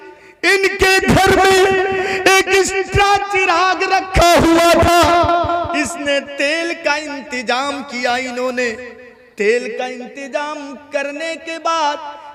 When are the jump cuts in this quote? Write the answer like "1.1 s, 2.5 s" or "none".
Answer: none